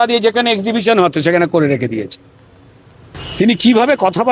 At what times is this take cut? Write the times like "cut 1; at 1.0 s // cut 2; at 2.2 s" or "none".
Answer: cut 1; at 3.2 s